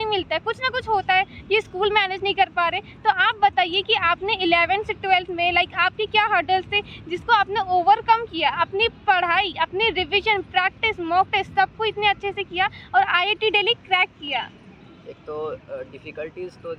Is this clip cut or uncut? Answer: uncut